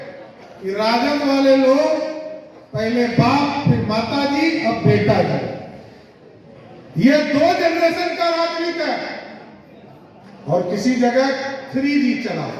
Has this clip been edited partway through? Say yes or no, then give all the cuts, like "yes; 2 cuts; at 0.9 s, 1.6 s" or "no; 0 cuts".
no; 0 cuts